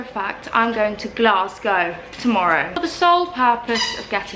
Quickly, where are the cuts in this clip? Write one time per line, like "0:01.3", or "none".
0:02.7